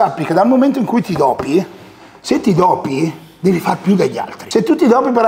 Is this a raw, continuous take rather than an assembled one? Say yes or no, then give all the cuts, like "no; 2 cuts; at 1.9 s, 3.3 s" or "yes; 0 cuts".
no; 1 cut; at 4.3 s